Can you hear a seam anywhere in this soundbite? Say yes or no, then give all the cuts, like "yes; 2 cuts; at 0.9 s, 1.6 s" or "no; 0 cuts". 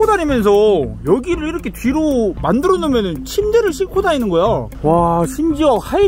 yes; 1 cut; at 4.7 s